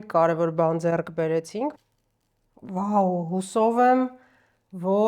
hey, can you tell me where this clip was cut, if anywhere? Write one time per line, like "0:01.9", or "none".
0:01.7